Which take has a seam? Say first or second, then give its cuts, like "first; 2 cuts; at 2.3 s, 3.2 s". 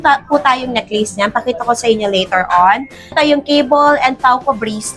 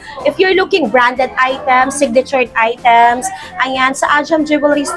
first; 1 cut; at 3.1 s